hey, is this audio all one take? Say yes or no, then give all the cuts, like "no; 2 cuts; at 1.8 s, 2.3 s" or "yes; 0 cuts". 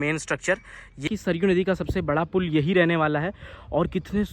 no; 1 cut; at 1.0 s